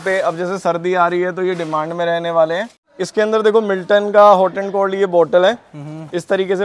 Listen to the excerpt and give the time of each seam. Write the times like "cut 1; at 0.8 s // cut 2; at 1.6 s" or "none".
cut 1; at 2.8 s